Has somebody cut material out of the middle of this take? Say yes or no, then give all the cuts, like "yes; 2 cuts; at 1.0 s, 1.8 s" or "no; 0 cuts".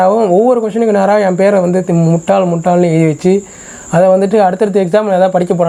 no; 0 cuts